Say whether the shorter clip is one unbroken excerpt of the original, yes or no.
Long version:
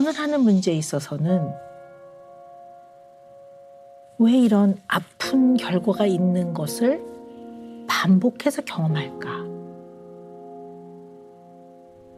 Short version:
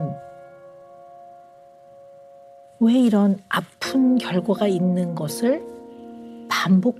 yes